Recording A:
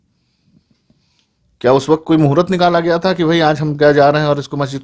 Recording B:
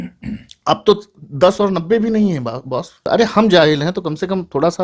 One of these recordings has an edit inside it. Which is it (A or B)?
B